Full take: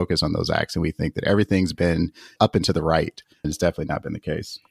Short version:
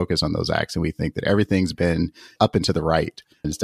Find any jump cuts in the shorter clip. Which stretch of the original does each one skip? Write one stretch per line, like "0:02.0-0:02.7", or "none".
none